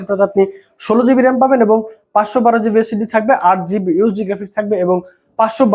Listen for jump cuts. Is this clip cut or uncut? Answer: uncut